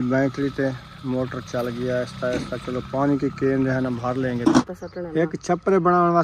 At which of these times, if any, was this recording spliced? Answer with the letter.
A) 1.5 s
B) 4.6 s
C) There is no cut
B